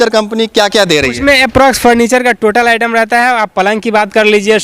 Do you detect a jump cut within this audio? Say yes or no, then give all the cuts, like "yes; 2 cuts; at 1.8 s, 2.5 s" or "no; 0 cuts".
no; 0 cuts